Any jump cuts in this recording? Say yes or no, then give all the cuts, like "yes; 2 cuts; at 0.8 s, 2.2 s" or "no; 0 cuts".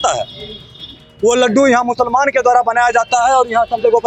no; 0 cuts